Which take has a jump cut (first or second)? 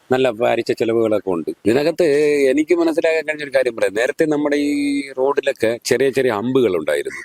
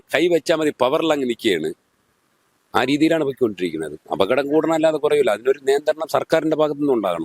first